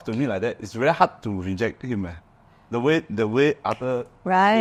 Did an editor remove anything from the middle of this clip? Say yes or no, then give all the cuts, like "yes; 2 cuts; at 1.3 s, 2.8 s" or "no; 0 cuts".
no; 0 cuts